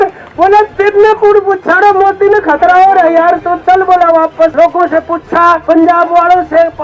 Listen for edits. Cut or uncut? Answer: cut